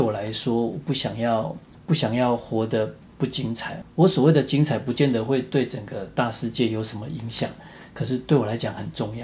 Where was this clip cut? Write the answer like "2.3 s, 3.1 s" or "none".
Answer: none

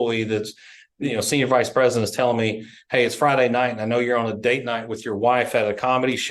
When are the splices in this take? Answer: none

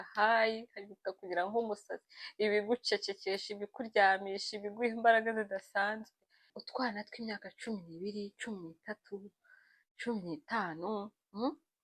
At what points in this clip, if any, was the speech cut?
6.5 s

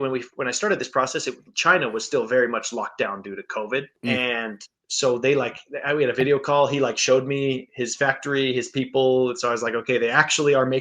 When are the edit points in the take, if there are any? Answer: 3.9 s

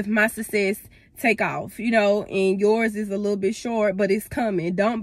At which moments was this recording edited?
none

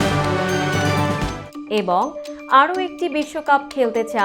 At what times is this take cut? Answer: 1.4 s

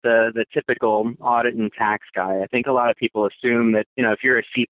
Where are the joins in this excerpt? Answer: none

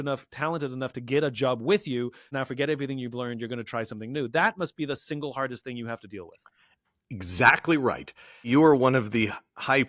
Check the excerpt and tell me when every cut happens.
2.2 s, 8.5 s

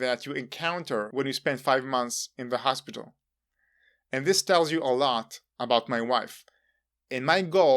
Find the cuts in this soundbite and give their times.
1.1 s

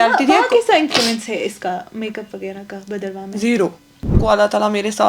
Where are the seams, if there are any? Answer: 4.2 s

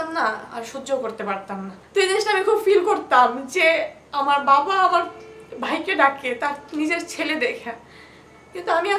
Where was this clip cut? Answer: 1.7 s

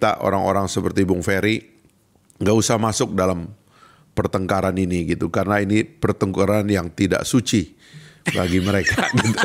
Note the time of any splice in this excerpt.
none

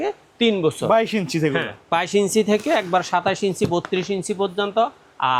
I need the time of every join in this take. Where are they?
none

